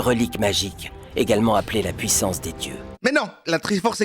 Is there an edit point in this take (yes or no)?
yes